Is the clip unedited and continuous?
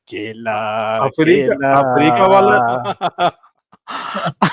no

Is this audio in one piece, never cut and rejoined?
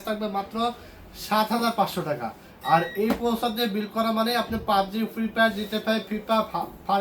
yes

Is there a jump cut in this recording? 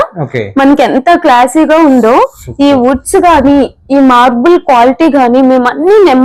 no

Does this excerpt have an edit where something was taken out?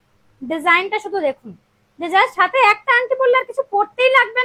no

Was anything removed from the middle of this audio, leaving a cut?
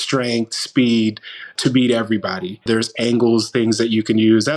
yes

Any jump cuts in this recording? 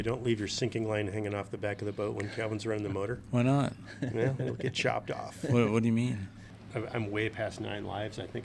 yes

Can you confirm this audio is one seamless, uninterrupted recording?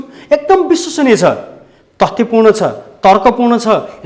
yes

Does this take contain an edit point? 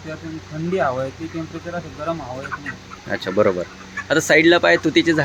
no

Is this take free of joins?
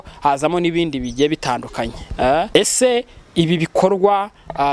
no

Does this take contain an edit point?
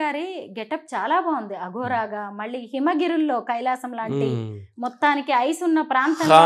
no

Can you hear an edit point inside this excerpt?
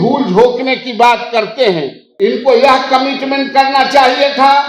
yes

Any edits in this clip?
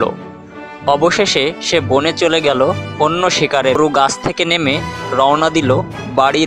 yes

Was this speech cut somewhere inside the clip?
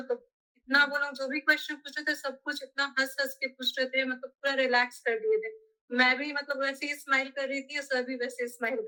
no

